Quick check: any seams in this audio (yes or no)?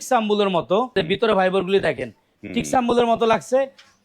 yes